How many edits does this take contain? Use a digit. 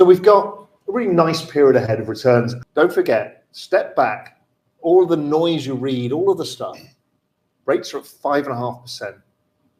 1